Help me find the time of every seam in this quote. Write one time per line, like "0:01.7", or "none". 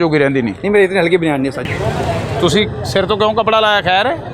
0:01.7